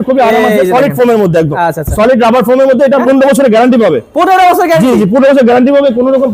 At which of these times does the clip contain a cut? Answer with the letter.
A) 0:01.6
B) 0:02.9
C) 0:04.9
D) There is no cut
B